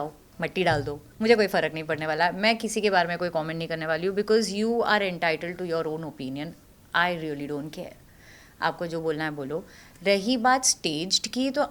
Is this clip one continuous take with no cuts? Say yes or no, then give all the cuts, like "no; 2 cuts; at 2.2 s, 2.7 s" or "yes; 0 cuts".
yes; 0 cuts